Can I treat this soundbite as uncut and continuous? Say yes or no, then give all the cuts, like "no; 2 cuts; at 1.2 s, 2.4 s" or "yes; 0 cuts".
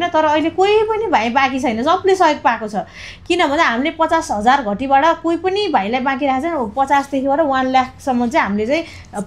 yes; 0 cuts